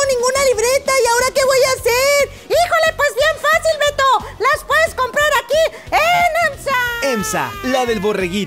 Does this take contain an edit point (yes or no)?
yes